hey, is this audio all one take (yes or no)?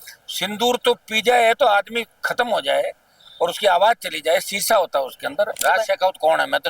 no